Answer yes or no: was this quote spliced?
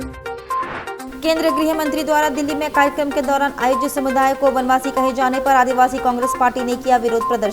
no